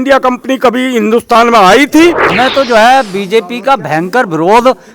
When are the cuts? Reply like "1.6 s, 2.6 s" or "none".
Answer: 2.3 s